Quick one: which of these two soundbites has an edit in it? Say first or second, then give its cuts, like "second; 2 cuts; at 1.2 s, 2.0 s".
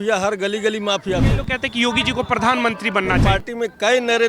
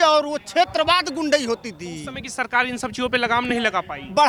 first; 2 cuts; at 1.3 s, 3.2 s